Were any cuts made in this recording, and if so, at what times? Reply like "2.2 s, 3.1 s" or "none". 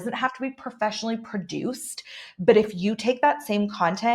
none